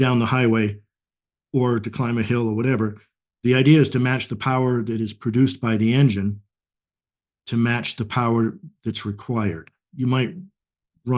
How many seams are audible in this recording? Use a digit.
1